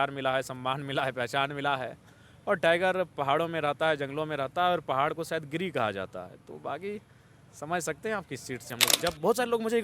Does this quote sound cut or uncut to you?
cut